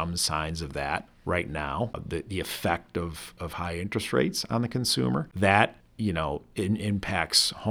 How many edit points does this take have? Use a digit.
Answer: 4